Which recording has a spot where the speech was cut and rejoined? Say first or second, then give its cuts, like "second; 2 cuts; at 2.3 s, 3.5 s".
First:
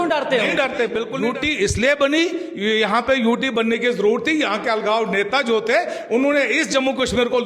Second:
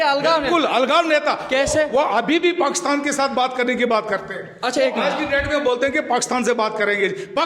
first; 1 cut; at 1.1 s